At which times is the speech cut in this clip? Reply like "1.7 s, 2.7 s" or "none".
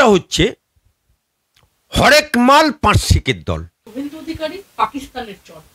3.8 s